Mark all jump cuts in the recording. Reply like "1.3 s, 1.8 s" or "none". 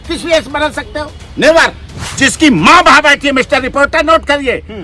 2.1 s